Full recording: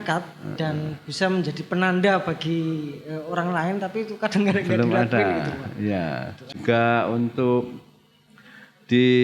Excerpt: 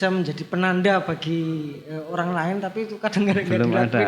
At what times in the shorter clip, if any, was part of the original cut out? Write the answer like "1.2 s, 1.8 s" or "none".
none